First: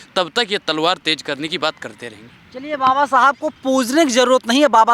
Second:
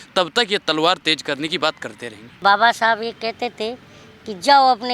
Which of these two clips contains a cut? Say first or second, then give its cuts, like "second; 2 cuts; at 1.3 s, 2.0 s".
second; 1 cut; at 2.4 s